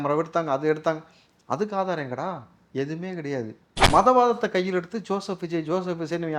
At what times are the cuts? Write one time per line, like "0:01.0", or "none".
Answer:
0:03.8